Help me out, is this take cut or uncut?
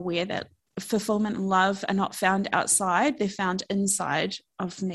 uncut